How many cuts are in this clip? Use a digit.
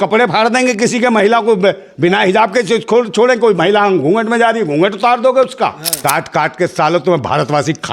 1